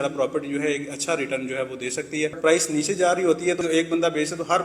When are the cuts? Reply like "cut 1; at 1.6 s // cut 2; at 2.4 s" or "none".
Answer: cut 1; at 2.4 s // cut 2; at 3.6 s